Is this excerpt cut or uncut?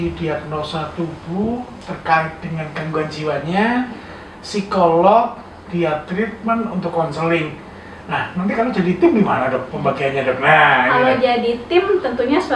uncut